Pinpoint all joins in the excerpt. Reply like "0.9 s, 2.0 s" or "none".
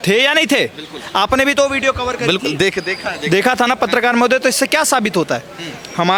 none

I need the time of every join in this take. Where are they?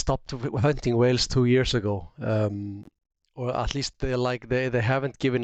none

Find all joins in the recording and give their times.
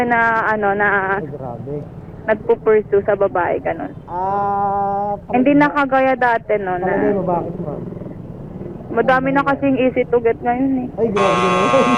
none

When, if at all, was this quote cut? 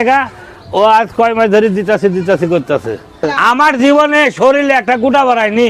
3.3 s

